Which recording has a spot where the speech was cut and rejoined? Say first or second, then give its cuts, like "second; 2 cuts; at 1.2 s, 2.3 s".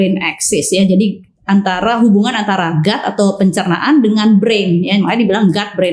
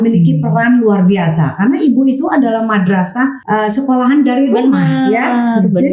second; 1 cut; at 3.4 s